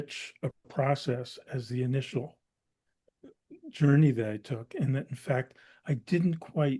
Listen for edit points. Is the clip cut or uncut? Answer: uncut